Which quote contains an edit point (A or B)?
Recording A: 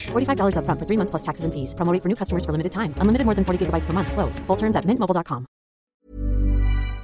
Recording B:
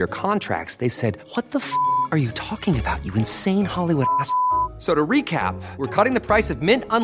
A